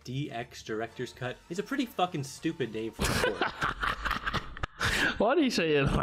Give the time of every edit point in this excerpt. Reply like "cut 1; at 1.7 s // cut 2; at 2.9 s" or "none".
cut 1; at 1.4 s